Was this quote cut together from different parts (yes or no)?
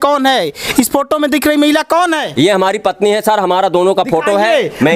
no